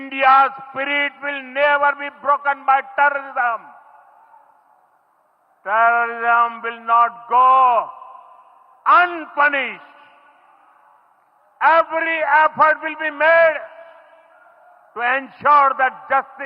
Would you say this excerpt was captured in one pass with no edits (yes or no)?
yes